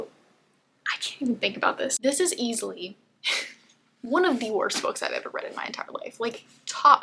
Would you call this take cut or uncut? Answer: cut